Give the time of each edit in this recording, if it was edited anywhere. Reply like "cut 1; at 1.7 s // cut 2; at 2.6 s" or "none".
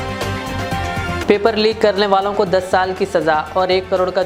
none